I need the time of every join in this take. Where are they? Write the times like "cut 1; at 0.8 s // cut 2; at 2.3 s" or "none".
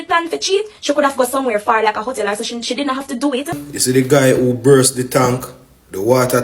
cut 1; at 3.6 s